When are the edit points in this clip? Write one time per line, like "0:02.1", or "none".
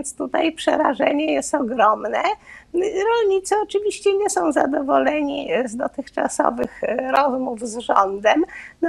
none